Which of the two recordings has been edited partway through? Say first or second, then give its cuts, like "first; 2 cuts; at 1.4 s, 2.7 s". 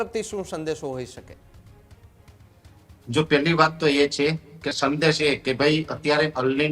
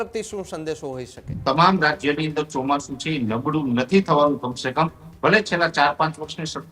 second; 1 cut; at 1.3 s